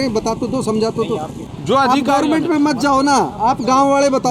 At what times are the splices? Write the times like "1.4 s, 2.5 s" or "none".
1.4 s